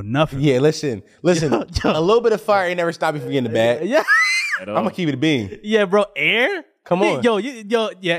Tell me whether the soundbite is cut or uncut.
uncut